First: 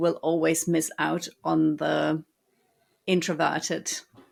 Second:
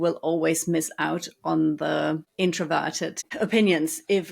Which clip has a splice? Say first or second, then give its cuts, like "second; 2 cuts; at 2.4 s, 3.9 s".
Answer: second; 2 cuts; at 2.3 s, 3.2 s